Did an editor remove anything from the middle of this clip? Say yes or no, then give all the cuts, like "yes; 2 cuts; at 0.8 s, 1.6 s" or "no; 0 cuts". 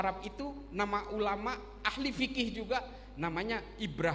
no; 0 cuts